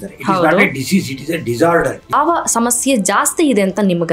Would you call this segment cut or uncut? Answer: cut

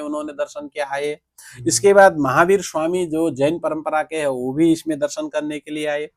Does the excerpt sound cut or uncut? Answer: uncut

